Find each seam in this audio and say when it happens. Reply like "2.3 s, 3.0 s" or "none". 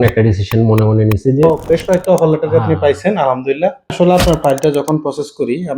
1.4 s, 3.9 s